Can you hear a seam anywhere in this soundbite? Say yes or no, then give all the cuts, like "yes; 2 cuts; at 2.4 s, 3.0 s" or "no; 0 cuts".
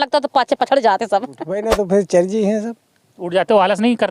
yes; 1 cut; at 1.6 s